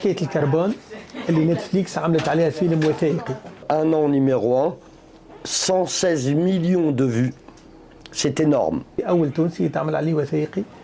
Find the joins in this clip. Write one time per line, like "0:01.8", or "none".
0:03.6
0:08.9